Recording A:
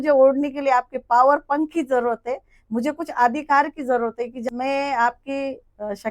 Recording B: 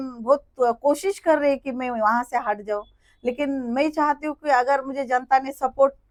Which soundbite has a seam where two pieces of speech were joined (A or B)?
A